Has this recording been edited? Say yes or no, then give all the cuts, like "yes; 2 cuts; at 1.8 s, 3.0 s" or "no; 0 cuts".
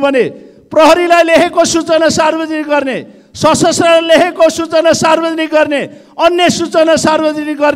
no; 0 cuts